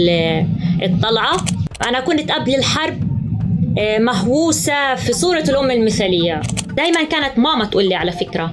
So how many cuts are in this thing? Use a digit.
3